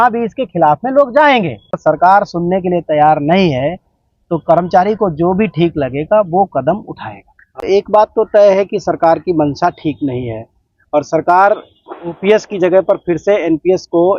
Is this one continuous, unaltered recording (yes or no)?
no